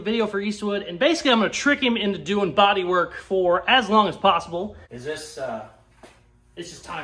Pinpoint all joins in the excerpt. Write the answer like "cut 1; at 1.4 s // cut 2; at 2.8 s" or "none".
cut 1; at 4.8 s